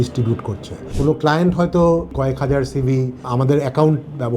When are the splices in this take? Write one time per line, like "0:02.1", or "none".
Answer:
0:00.9
0:02.1